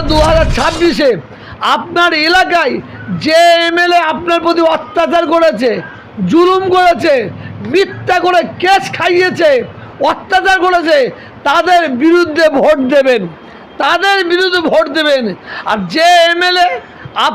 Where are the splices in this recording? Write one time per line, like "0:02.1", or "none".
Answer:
none